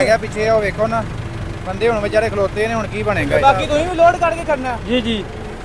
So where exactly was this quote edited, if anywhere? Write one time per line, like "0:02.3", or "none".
0:03.3